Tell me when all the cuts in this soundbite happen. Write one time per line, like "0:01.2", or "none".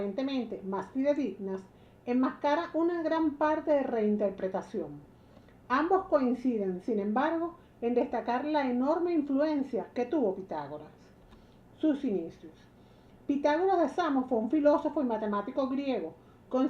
none